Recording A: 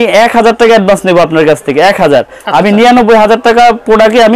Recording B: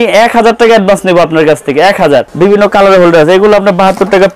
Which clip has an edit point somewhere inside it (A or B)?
B